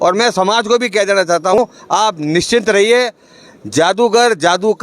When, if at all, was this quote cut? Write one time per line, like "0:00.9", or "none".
0:01.6